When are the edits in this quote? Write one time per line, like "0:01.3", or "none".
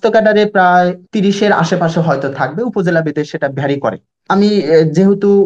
0:01.0
0:04.2